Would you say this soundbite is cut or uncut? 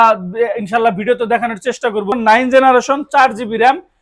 cut